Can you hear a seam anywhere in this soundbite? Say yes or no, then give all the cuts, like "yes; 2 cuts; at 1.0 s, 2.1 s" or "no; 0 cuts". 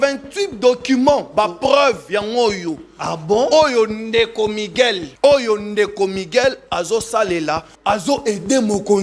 yes; 2 cuts; at 5.1 s, 7.7 s